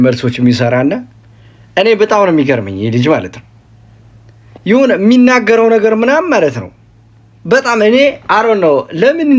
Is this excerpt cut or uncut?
uncut